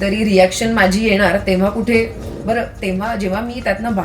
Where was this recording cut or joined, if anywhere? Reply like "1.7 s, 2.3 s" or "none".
2.3 s

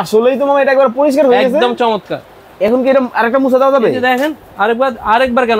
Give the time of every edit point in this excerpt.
none

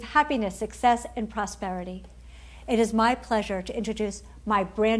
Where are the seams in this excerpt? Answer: 2.3 s

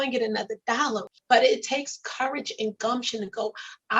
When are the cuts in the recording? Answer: 1.1 s

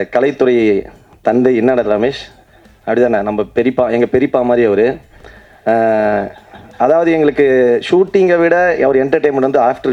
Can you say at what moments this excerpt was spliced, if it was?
none

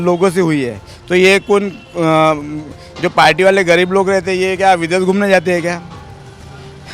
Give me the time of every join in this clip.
none

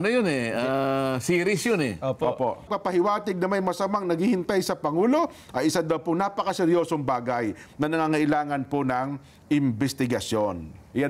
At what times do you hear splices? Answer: 2.7 s

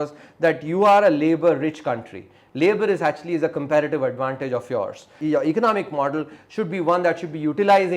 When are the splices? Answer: 5.1 s

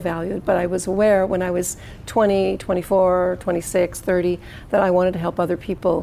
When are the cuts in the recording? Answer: none

